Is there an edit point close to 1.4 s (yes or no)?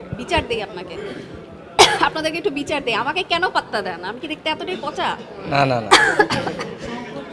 no